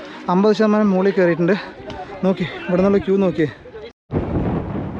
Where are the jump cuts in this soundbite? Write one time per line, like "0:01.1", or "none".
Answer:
0:04.0